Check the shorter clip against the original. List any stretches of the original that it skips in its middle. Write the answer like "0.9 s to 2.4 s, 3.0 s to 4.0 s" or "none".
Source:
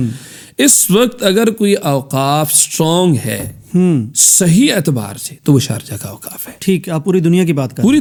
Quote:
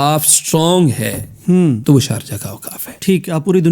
4.1 s to 5.4 s

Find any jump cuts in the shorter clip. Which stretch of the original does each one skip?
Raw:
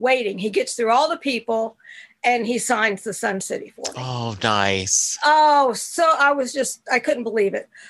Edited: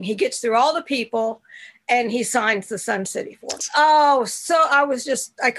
3.9 s to 5.0 s

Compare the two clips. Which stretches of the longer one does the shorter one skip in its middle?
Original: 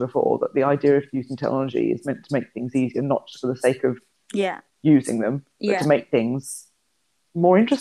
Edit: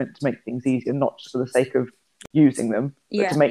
4.2 s to 4.6 s

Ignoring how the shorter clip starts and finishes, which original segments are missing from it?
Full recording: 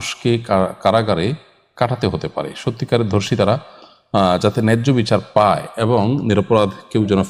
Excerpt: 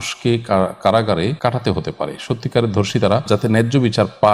1.4 s to 1.7 s, 3.6 s to 4.4 s

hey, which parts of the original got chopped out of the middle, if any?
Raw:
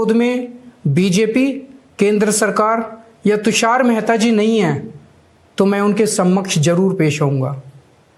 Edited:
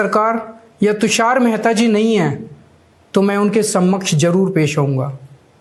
none

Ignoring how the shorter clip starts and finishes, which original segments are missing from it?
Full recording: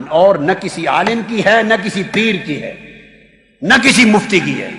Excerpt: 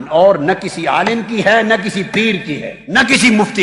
2.7 s to 3.5 s

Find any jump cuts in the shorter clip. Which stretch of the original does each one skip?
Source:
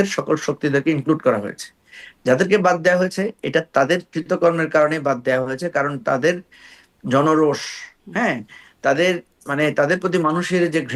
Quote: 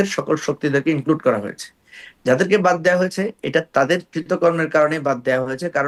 none

